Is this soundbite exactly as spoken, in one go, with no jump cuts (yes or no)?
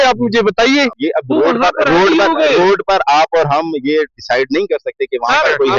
no